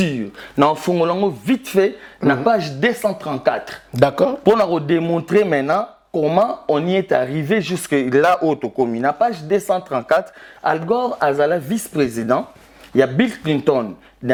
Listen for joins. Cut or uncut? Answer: uncut